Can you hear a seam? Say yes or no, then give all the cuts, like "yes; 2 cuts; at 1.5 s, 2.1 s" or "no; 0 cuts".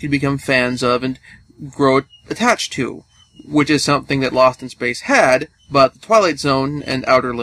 no; 0 cuts